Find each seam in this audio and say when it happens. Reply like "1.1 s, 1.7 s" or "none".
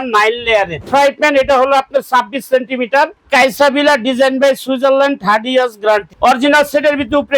0.9 s, 3.2 s, 6.1 s

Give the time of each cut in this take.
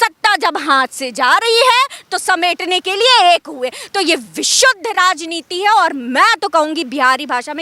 none

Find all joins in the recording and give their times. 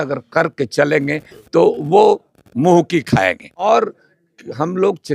3.7 s

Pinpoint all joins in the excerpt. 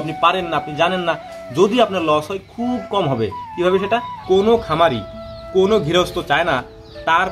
4.1 s

